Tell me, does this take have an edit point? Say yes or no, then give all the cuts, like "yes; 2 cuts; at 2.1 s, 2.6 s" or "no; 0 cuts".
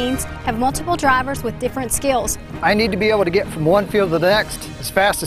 yes; 1 cut; at 2.4 s